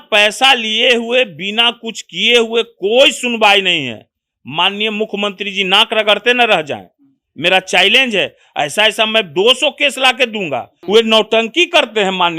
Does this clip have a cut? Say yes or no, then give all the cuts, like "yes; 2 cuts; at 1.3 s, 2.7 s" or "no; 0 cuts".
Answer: yes; 1 cut; at 10.7 s